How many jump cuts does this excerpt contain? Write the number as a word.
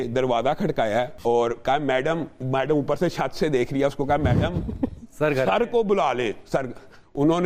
one